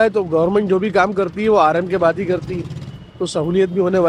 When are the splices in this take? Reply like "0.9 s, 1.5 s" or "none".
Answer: none

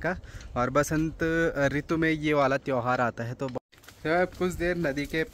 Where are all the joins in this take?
3.6 s

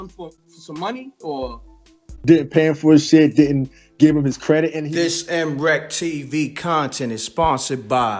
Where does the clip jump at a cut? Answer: 4.8 s

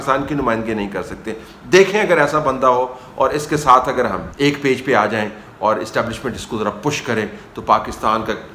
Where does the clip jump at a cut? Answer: 4.3 s

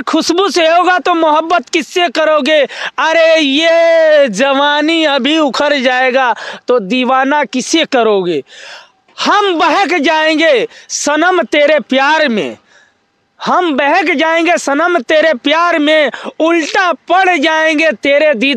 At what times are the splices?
none

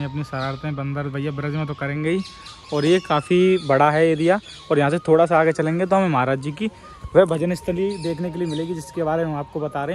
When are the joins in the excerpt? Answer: none

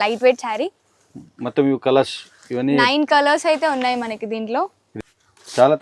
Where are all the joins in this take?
4.8 s

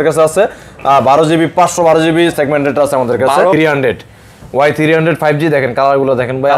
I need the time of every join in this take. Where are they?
3.5 s

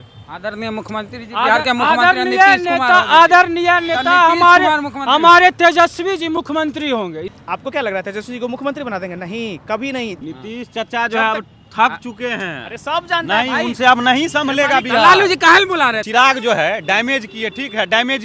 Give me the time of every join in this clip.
7.3 s, 10.2 s, 16.0 s

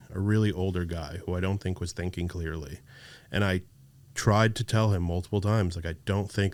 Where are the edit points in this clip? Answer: none

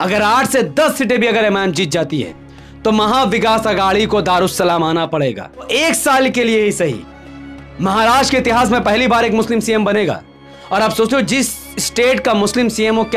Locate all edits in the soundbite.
5.7 s

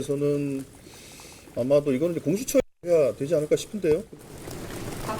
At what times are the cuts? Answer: 4.1 s

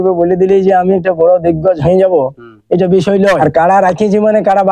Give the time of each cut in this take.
3.4 s

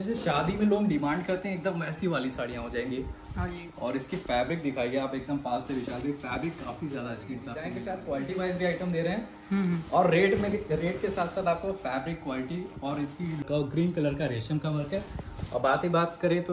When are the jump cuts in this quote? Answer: 7.7 s, 13.4 s

